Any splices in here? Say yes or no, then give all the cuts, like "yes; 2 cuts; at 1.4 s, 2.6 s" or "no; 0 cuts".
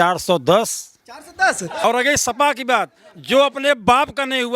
yes; 1 cut; at 1.8 s